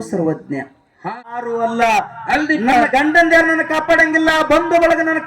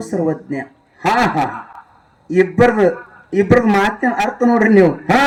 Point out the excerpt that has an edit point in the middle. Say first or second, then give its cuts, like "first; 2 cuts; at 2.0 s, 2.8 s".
first; 1 cut; at 1.1 s